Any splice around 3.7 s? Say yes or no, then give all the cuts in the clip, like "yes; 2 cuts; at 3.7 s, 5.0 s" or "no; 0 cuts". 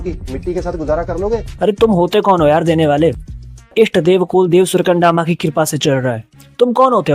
yes; 1 cut; at 3.7 s